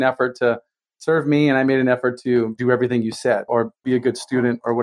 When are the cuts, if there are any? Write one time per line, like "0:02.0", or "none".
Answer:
0:02.6
0:03.5